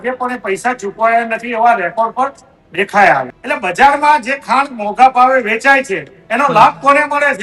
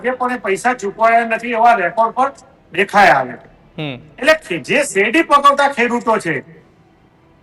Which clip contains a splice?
first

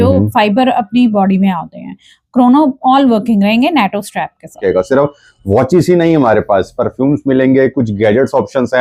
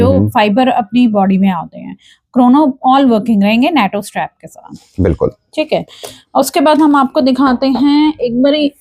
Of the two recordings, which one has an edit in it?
first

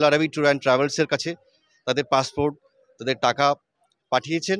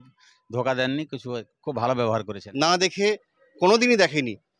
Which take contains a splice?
second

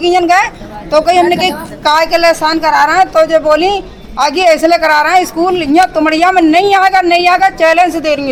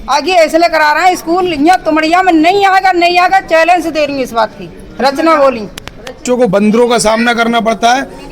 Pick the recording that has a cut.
second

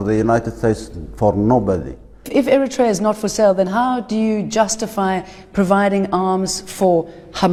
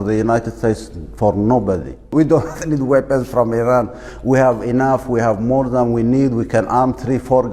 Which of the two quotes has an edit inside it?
second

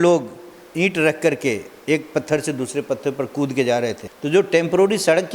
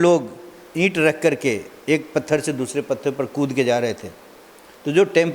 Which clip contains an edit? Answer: first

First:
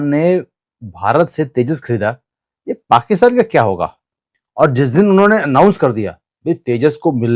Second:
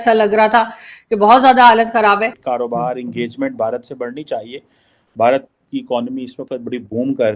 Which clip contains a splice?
second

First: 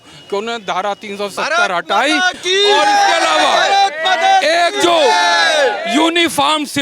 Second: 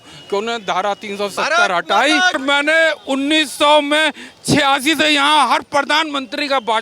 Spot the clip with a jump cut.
second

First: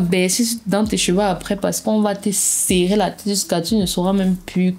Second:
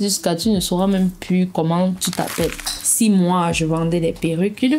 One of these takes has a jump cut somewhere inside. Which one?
second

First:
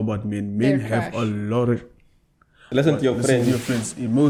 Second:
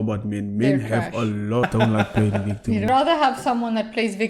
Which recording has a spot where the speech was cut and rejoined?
second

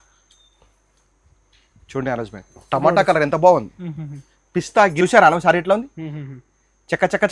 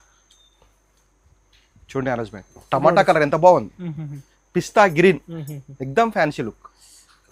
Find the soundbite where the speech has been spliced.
first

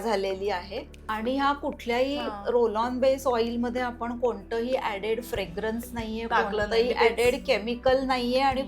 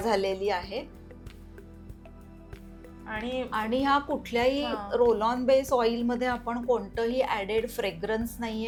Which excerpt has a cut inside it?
first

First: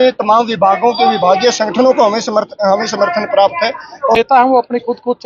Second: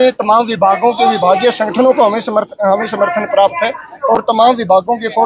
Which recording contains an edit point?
first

